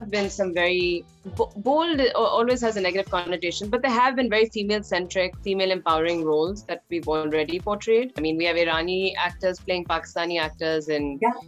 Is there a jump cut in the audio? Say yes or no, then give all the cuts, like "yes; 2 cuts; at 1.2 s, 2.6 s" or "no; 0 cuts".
yes; 2 cuts; at 1.2 s, 8.2 s